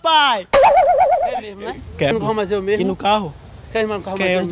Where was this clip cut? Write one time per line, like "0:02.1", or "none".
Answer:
0:02.2